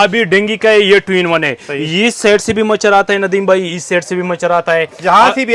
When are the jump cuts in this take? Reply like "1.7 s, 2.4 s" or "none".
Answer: none